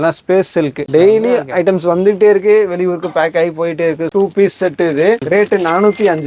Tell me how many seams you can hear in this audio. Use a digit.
3